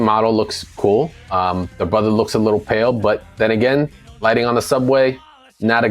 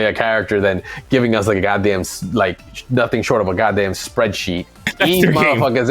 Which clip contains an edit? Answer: second; 1 cut; at 4.9 s

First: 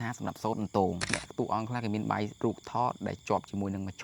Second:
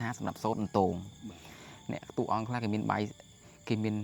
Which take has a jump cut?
first; 2 cuts; at 1.1 s, 2.3 s

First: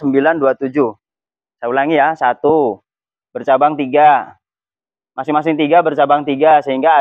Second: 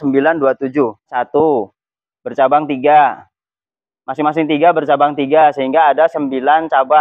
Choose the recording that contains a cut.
second; 1 cut; at 1.1 s

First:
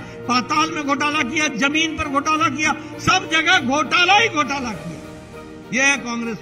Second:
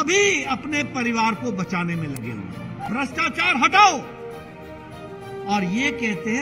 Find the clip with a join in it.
second; 1 cut; at 2.8 s

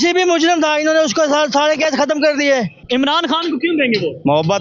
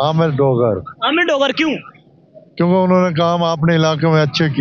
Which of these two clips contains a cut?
first; 1 cut; at 2.8 s

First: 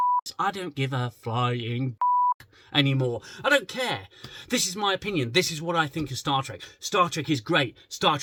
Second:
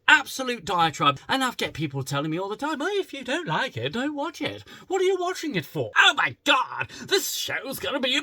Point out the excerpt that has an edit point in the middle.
second; 2 cuts; at 1.2 s, 5.9 s

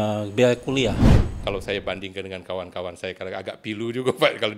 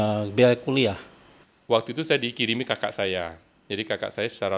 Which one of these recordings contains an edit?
first; 1 cut; at 1.4 s

